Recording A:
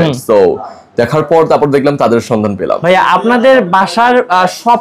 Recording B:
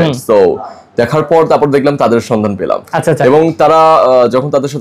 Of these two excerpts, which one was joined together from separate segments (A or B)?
A